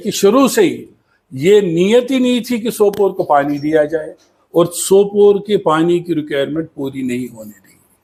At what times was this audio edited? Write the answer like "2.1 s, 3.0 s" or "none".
none